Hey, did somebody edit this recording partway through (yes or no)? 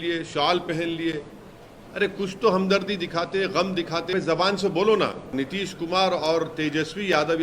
yes